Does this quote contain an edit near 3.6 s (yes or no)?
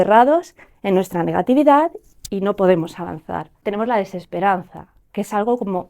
yes